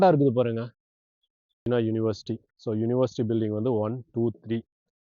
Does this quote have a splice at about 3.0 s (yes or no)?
no